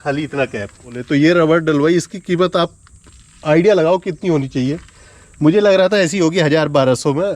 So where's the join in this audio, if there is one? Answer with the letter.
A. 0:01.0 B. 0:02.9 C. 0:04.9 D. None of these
A